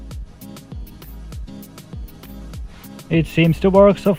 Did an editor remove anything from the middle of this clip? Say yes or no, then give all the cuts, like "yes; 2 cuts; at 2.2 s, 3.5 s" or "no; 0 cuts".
no; 0 cuts